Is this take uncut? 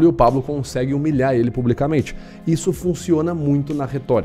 yes; 0 cuts

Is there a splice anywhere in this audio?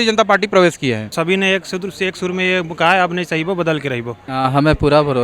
yes; 2 cuts; at 1.1 s, 4.3 s

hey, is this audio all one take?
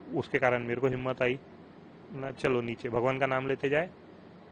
yes; 0 cuts

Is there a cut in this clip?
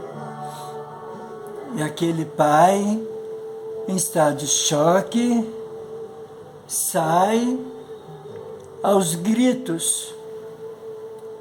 yes; 1 cut; at 1.5 s

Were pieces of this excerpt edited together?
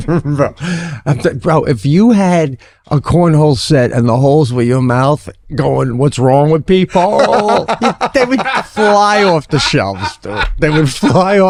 no; 0 cuts

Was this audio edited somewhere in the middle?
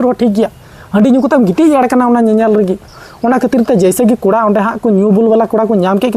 yes; 1 cut; at 3.0 s

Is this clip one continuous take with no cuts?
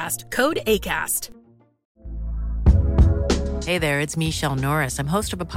yes; 0 cuts

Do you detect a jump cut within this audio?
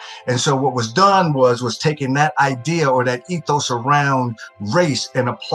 no; 0 cuts

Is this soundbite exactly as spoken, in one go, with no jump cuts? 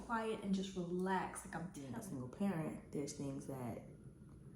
no; 1 cut; at 1.8 s

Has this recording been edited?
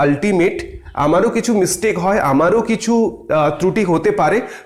no; 0 cuts

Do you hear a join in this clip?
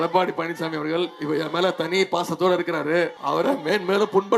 yes; 1 cut; at 3.2 s

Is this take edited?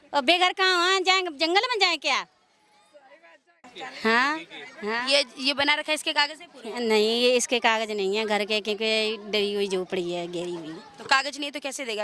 yes; 1 cut; at 3.6 s

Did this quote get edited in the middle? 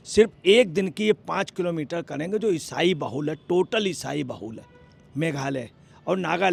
no; 0 cuts

